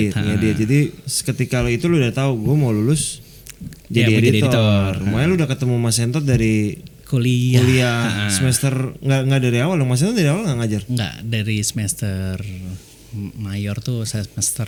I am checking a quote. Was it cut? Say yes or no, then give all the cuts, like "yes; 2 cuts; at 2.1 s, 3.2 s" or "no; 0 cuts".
no; 0 cuts